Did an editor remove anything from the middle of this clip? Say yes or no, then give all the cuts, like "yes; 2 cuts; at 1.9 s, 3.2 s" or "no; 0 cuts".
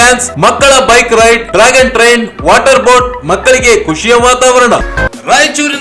yes; 1 cut; at 4.9 s